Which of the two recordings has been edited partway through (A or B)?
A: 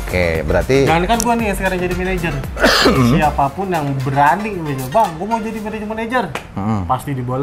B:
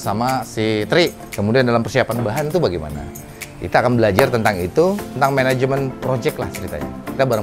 B